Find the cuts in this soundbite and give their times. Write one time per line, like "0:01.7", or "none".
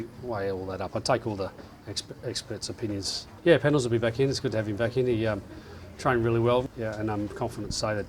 0:03.2
0:06.6

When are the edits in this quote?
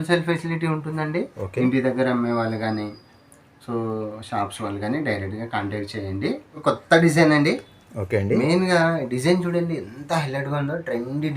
0:06.6

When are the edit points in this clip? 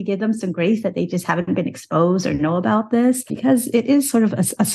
0:03.3

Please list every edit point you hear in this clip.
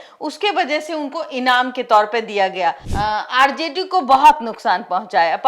0:02.9

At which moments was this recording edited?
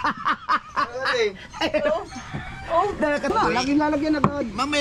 0:03.3

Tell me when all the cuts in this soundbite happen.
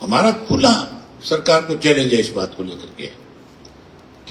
none

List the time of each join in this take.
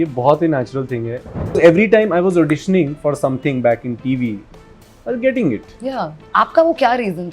0:01.6
0:06.1

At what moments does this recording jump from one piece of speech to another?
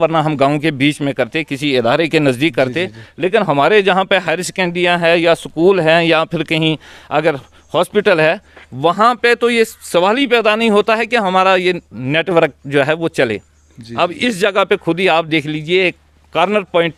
none

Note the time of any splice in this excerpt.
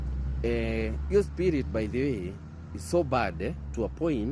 none

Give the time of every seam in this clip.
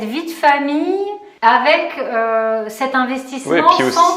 0:01.2

